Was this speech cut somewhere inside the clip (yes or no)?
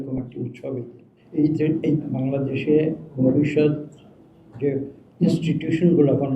yes